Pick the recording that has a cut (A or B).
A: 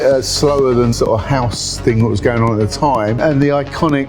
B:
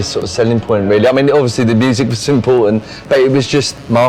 A